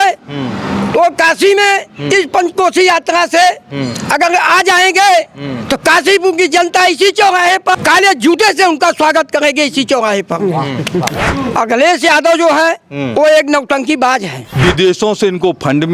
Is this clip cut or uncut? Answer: cut